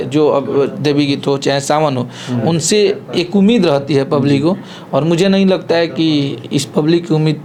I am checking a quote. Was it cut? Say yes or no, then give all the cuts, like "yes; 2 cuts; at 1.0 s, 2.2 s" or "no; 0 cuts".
no; 0 cuts